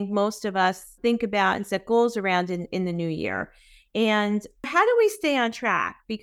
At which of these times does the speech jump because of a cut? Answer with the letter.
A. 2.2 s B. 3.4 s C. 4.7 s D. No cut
C